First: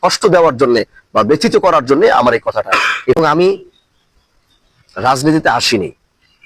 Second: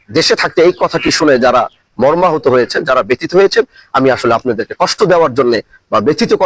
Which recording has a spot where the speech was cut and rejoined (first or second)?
first